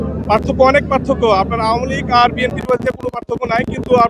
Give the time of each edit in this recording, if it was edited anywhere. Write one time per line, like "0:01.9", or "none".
none

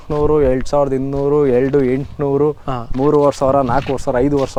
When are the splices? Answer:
none

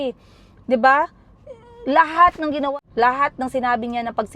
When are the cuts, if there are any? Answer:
0:02.7

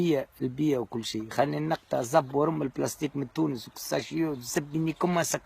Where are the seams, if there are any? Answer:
0:02.7

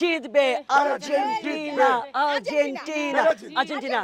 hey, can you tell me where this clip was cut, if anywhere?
none

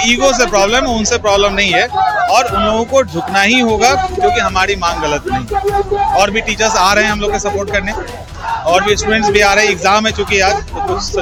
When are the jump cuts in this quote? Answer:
none

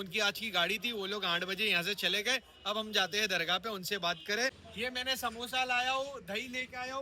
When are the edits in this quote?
0:04.6

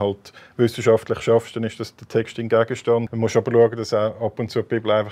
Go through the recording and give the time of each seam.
0:03.1

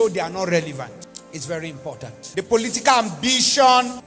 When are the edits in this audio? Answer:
0:02.1

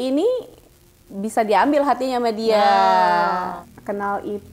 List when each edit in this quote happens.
0:03.6

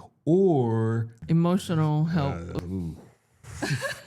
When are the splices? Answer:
0:01.2
0:02.6

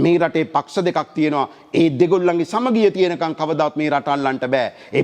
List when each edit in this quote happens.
none

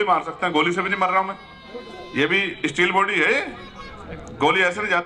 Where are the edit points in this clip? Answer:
none

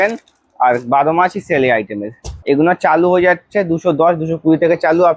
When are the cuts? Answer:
0:02.4

